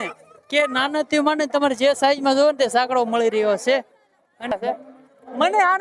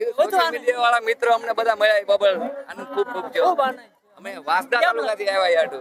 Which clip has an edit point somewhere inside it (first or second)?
first